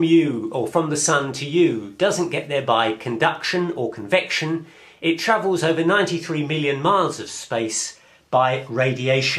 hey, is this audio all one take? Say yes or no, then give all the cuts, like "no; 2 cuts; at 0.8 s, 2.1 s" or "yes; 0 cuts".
no; 1 cut; at 7.3 s